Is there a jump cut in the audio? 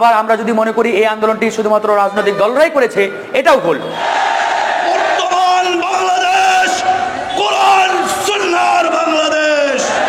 yes; 1 cut; at 4.0 s

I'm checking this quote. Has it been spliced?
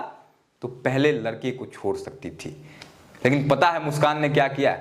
no; 0 cuts

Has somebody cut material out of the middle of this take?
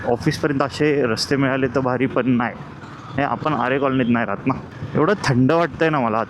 yes; 1 cut; at 4.7 s

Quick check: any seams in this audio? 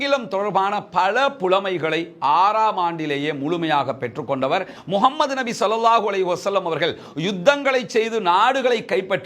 yes; 1 cut; at 4.7 s

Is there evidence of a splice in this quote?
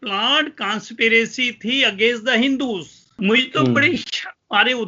yes; 1 cut; at 3.2 s

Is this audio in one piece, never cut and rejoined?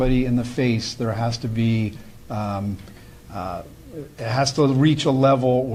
yes; 0 cuts

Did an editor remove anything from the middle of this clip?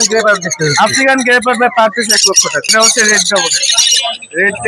yes; 1 cut; at 2.7 s

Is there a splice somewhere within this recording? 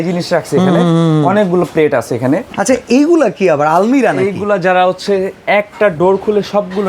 yes; 1 cut; at 2.5 s

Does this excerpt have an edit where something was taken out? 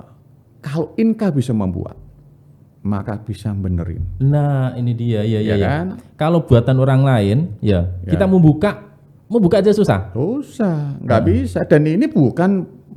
no; 0 cuts

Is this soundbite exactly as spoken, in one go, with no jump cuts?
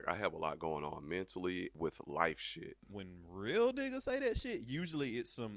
no; 1 cut; at 2.8 s

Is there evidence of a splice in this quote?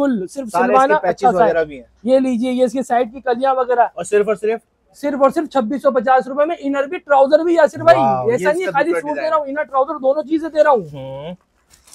no; 0 cuts

